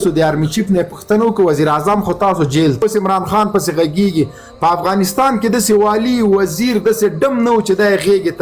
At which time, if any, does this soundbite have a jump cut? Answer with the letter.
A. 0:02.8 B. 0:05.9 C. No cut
A